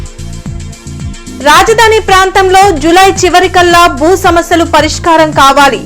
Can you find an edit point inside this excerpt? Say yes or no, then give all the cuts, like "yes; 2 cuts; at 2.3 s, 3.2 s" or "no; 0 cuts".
yes; 1 cut; at 1.0 s